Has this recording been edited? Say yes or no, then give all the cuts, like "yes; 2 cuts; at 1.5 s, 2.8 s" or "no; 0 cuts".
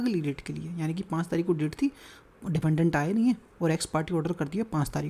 no; 0 cuts